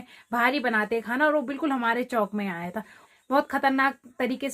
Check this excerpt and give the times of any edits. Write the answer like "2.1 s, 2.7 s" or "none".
3.1 s